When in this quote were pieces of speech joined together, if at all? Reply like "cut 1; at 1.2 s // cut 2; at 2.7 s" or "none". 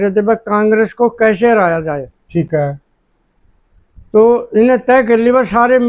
none